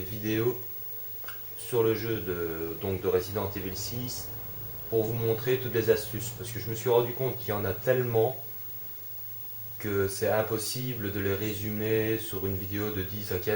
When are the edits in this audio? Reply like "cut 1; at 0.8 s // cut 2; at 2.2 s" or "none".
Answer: cut 1; at 3.4 s